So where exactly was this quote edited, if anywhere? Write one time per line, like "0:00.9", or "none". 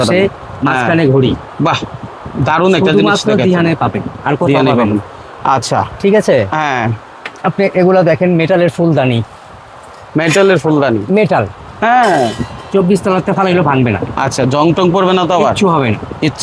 none